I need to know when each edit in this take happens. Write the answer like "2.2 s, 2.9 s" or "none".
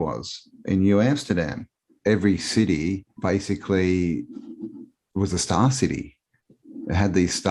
1.9 s, 3.1 s